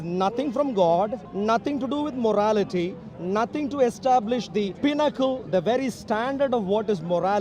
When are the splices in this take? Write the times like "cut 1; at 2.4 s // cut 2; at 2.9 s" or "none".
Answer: cut 1; at 1.2 s // cut 2; at 4.7 s